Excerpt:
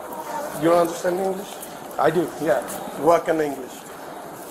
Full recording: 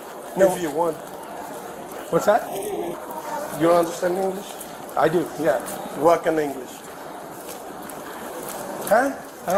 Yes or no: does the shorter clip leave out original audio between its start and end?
no